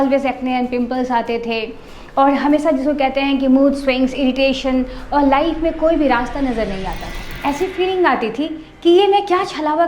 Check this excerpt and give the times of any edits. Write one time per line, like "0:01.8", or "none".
0:07.3

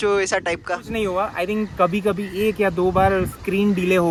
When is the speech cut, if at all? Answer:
none

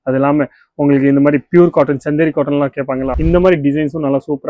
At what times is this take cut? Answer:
0:03.1

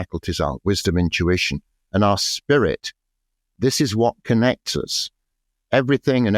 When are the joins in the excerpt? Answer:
0:03.5

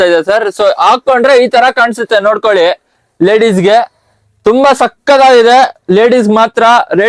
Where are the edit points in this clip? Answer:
none

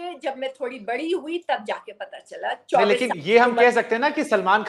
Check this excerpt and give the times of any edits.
none

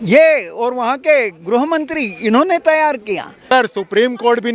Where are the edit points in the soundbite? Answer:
0:03.5

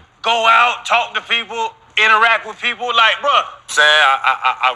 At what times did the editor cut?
0:03.7

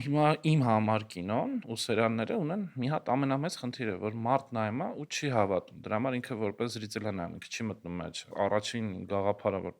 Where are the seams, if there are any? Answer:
0:01.7
0:08.3

